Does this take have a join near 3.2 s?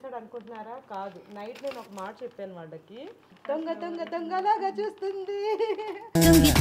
yes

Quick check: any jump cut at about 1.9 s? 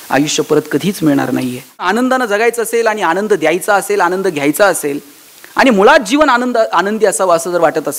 yes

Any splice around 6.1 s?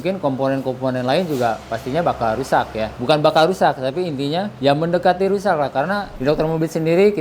yes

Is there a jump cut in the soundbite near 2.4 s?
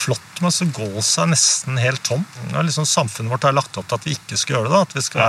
yes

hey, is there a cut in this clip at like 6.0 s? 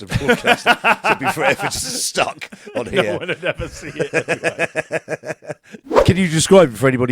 yes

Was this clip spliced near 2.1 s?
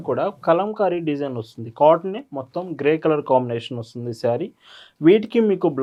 no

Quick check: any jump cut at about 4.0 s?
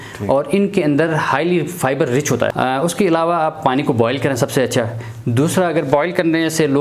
no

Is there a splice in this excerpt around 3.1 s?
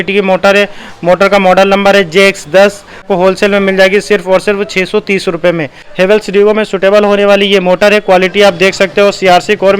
yes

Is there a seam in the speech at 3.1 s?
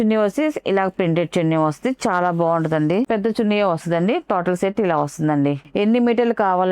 yes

